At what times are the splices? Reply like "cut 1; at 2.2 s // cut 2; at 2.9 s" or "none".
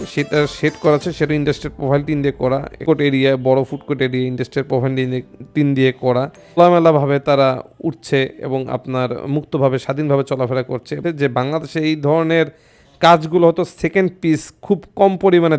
cut 1; at 2.8 s // cut 2; at 6.6 s // cut 3; at 11.0 s

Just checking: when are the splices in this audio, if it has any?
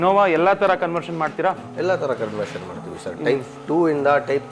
none

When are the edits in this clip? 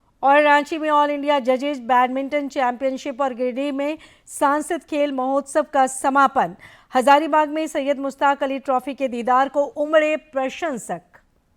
none

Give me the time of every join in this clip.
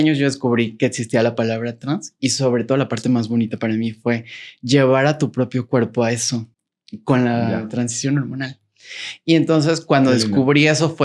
none

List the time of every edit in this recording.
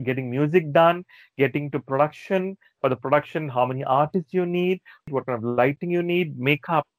cut 1; at 5.1 s

